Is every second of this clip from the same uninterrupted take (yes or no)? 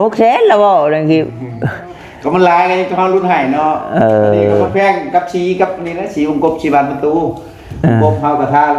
yes